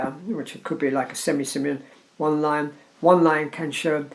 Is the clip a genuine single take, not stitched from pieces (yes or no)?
yes